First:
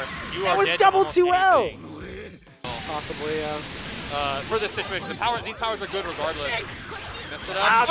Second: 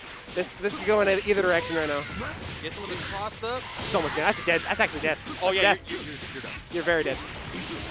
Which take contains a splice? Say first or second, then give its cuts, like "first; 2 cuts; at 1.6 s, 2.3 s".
first; 1 cut; at 2.6 s